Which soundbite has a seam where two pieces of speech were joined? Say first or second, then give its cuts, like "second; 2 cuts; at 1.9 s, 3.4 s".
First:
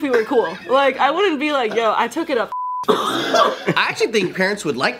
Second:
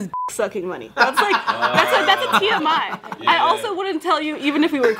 first; 1 cut; at 3.7 s